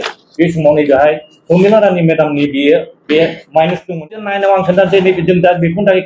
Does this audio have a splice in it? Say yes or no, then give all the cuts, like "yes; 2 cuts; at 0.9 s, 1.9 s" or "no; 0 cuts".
yes; 1 cut; at 4.2 s